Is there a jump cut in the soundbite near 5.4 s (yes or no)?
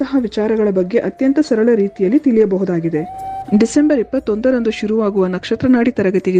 no